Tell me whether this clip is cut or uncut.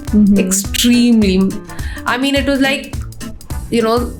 uncut